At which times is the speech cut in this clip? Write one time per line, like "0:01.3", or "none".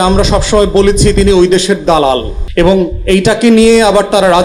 0:02.4